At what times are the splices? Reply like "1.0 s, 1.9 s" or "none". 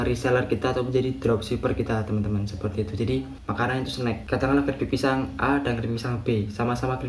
3.4 s